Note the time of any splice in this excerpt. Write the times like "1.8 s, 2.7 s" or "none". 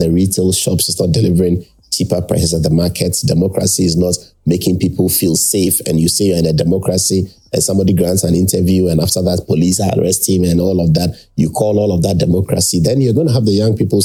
none

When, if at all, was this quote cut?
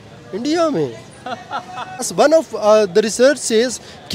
2.1 s

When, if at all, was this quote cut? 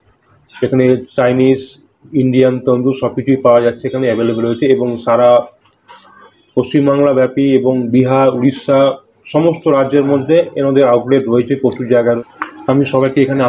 12.2 s

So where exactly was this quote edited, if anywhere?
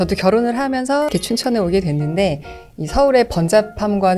1.1 s

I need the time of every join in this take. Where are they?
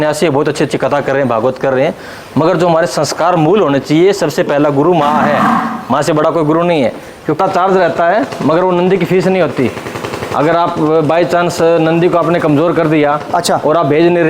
7.4 s

